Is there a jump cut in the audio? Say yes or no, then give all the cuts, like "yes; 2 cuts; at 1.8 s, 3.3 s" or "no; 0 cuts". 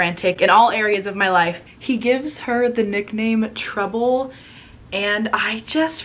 yes; 1 cut; at 1.6 s